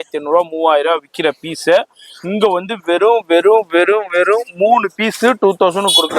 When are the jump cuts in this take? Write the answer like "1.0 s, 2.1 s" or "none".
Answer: none